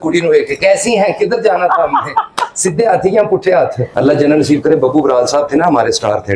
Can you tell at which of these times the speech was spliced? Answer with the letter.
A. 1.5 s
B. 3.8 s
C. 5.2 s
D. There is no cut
B